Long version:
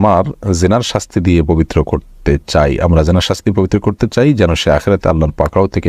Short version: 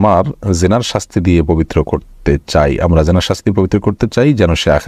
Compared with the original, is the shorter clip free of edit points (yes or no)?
yes